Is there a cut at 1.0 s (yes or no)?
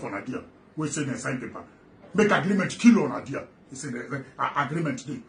no